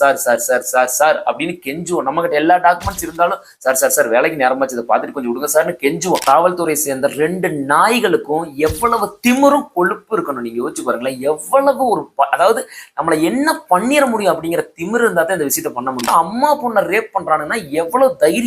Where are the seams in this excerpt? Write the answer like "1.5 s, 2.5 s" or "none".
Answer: 6.2 s, 16.1 s